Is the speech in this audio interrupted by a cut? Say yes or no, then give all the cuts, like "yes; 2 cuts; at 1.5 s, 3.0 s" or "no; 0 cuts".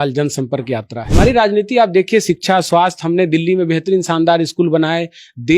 yes; 1 cut; at 1.0 s